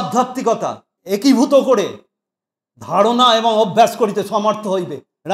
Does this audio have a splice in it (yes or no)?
yes